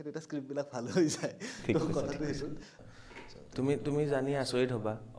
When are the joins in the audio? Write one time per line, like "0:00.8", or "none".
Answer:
0:02.7